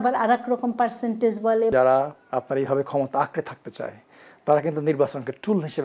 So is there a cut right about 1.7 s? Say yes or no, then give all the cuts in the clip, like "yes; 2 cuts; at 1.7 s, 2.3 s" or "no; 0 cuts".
yes; 1 cut; at 1.7 s